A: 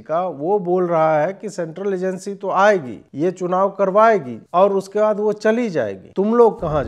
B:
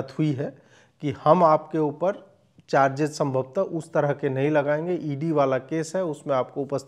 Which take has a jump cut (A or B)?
A